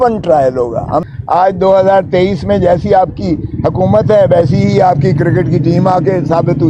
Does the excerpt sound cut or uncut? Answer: cut